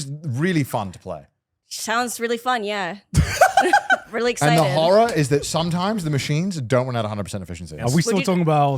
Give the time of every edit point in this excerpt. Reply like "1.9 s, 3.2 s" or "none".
7.8 s